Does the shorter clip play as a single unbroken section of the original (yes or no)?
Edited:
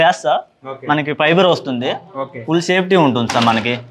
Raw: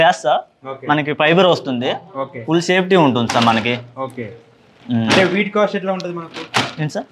yes